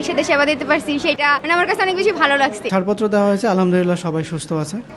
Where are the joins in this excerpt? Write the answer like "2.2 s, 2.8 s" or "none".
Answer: 1.2 s, 2.7 s